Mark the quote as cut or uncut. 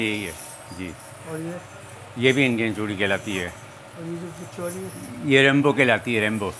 uncut